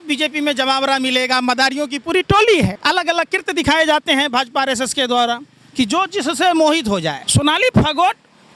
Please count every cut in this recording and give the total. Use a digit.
2